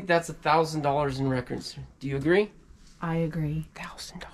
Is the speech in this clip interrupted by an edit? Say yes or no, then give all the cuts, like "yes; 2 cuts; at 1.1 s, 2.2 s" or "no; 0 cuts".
no; 0 cuts